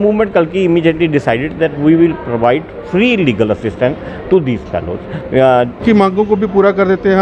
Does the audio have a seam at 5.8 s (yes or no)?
yes